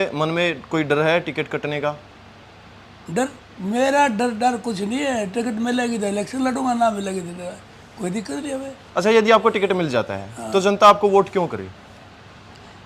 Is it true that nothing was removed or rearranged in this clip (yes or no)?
yes